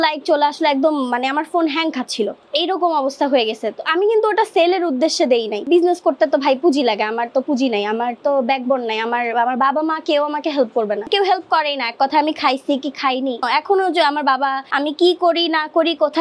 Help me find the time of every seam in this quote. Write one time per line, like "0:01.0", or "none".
0:05.6